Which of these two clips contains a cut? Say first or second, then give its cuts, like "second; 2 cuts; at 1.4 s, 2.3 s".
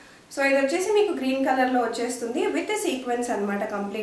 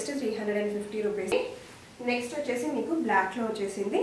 second; 1 cut; at 1.3 s